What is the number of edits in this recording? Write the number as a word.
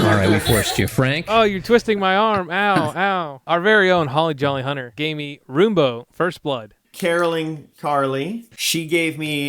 four